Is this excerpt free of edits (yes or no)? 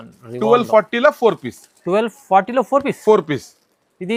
yes